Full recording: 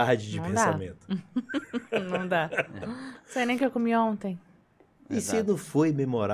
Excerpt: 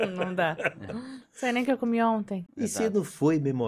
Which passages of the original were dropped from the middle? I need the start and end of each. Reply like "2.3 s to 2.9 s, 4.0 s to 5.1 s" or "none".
4.4 s to 5.0 s